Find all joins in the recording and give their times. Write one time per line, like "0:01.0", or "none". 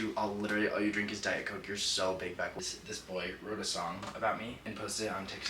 0:02.5
0:04.6